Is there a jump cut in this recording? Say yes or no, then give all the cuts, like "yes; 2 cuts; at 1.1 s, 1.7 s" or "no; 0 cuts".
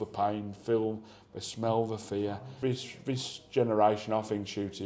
yes; 1 cut; at 2.5 s